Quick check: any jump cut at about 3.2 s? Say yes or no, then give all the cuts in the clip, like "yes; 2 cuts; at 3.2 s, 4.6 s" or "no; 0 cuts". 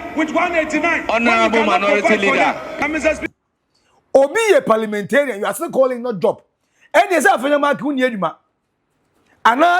yes; 1 cut; at 3.2 s